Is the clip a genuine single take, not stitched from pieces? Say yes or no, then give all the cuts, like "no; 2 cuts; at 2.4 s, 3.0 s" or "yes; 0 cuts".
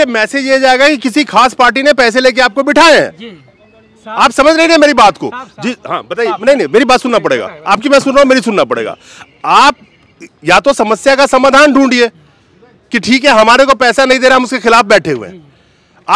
yes; 0 cuts